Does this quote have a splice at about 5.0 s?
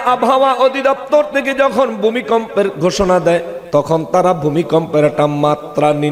no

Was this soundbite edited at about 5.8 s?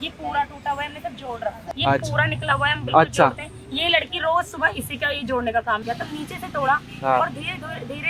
yes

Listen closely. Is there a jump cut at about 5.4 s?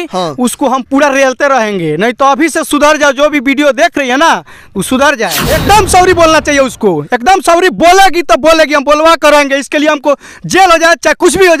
yes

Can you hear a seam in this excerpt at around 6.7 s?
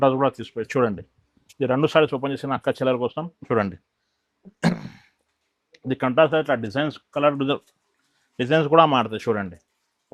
no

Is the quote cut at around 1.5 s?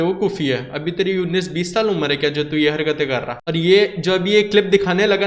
no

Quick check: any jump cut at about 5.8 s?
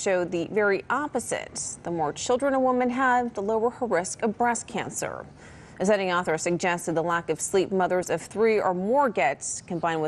no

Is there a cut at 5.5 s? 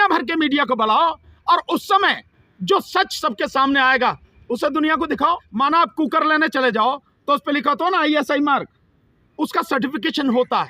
yes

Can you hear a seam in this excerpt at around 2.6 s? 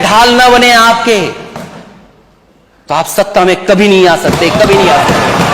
no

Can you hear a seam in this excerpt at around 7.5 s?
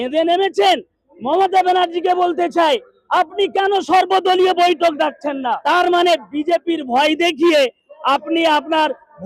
no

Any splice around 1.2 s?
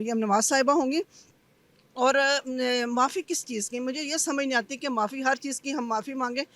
no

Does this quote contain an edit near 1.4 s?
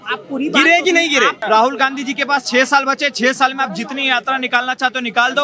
yes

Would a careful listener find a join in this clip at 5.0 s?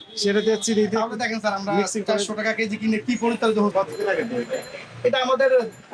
no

